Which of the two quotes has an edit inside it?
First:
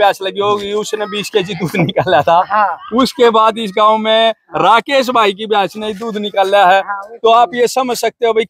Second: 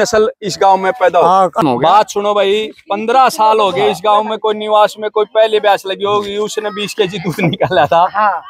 second; 1 cut; at 1.6 s

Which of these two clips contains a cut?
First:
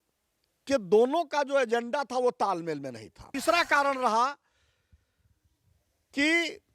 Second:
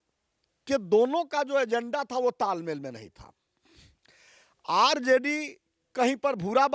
first; 1 cut; at 3.2 s

